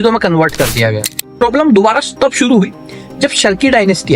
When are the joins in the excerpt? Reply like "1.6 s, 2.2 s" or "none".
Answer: 1.4 s